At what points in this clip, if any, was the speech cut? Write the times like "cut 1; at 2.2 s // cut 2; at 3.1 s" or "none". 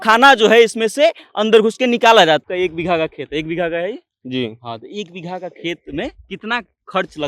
cut 1; at 2.4 s

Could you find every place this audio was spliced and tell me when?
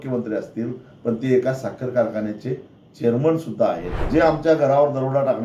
cut 1; at 4.1 s

